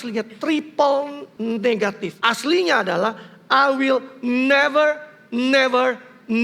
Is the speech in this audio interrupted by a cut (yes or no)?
yes